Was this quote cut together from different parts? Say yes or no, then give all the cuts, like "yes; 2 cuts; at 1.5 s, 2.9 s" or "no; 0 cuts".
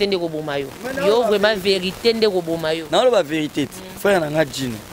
no; 0 cuts